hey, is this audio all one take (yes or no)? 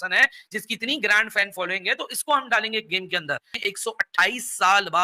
yes